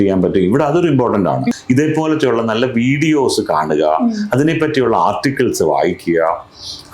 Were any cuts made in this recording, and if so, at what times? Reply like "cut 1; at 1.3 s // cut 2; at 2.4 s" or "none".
cut 1; at 1.6 s

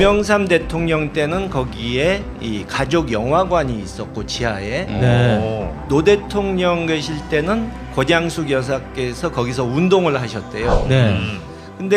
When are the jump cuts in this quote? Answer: cut 1; at 10.7 s

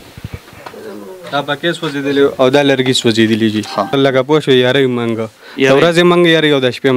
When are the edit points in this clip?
cut 1; at 3.9 s

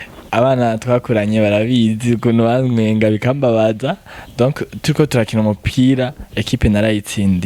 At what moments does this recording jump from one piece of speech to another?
none

